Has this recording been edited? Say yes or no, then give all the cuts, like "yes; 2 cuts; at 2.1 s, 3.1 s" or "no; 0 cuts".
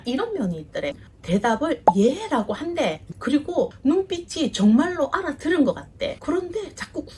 no; 0 cuts